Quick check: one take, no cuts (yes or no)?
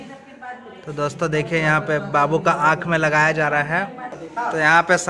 no